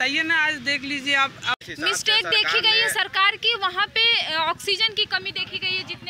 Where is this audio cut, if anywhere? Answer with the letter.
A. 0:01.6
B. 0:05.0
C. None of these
A